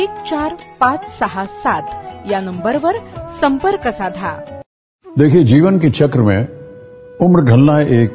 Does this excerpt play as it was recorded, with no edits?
no; 1 cut; at 4.6 s

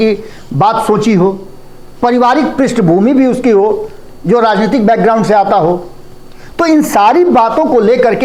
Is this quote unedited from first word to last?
yes; 0 cuts

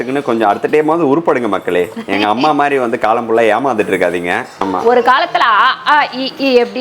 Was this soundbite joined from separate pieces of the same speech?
yes; 1 cut; at 4.5 s

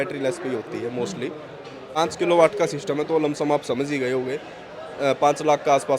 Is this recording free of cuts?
no; 1 cut; at 2.0 s

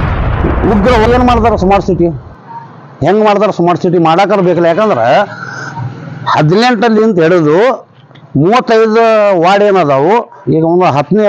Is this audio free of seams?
no; 1 cut; at 1.1 s

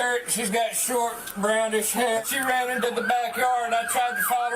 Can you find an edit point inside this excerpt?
yes; 1 cut; at 2.3 s

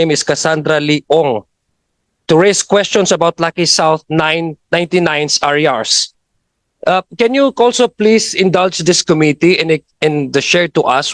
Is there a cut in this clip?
no; 0 cuts

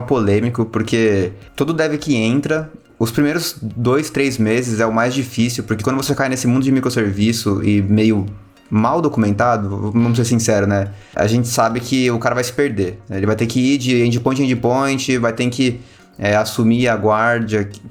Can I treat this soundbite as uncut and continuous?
no; 2 cuts; at 1.4 s, 2.9 s

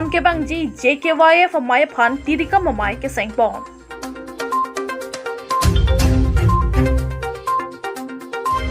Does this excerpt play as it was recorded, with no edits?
no; 2 cuts; at 3.8 s, 6.8 s

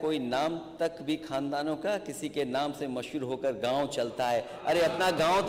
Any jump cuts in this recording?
no; 0 cuts

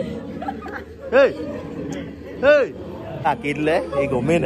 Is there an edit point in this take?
yes; 1 cut; at 3.2 s

